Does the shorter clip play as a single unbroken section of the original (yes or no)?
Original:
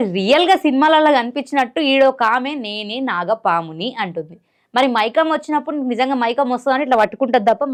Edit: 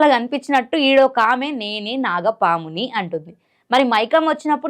yes